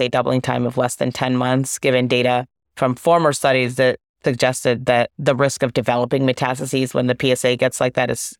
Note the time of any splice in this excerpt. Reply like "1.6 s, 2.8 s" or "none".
4.1 s